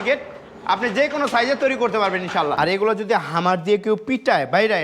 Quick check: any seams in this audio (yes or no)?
yes